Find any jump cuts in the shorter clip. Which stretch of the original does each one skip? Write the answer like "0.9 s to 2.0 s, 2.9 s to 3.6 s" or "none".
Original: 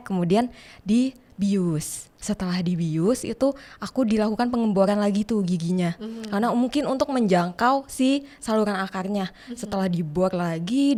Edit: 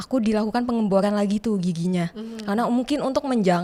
none